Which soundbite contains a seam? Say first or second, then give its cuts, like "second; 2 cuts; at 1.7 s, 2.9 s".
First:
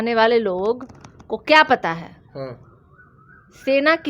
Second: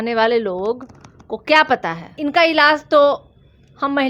second; 1 cut; at 2.2 s